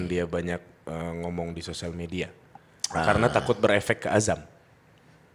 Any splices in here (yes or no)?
no